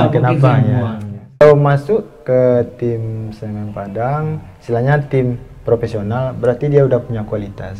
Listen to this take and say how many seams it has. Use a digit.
1